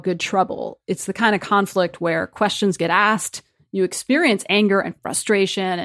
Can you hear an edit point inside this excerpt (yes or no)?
no